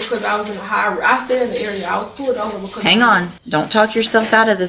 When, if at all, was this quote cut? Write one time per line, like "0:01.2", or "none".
0:03.4